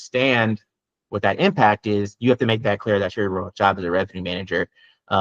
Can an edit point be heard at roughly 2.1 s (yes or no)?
no